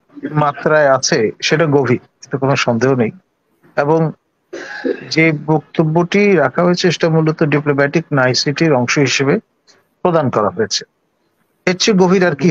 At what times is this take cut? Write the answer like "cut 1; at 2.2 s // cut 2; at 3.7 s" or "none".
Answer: none

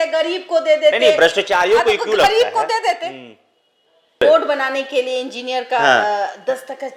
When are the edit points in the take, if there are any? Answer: none

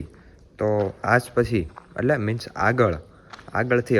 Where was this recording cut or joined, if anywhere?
none

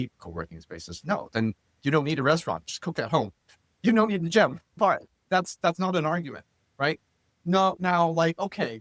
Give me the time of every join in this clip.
cut 1; at 4.8 s

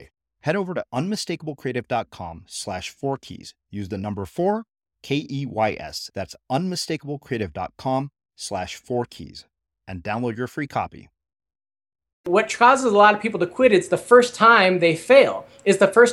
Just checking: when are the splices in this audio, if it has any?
cut 1; at 12.3 s

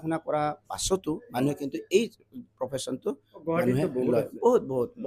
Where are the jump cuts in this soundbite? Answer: none

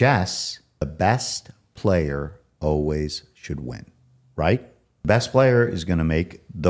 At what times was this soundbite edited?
cut 1; at 0.8 s // cut 2; at 5.1 s

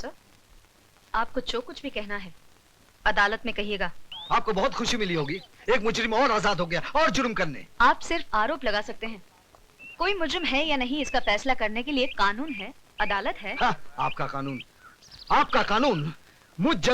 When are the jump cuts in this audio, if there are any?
cut 1; at 4.1 s

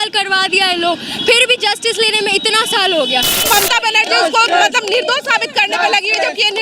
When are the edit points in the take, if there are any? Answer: cut 1; at 3.5 s

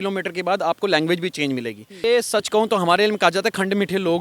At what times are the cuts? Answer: cut 1; at 2.0 s

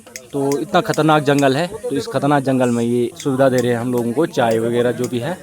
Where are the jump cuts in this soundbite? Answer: cut 1; at 3.2 s

